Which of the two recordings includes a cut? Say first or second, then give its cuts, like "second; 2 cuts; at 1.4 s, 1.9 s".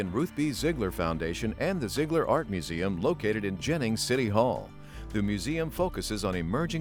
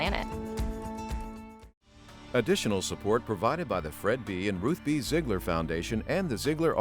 second; 1 cut; at 2.1 s